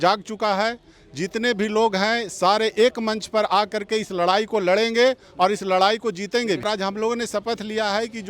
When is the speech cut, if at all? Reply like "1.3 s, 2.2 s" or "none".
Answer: 6.6 s